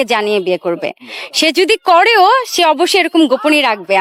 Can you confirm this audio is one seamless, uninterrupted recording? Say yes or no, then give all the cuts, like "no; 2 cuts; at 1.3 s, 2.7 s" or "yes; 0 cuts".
yes; 0 cuts